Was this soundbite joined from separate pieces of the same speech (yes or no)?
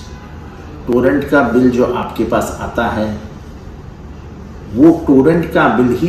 no